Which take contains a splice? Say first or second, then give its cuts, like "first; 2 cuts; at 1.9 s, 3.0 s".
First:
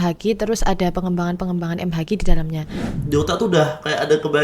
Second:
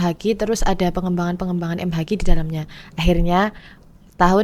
first; 1 cut; at 2.9 s